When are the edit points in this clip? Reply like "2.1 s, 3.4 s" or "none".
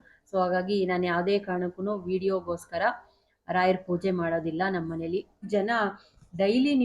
5.4 s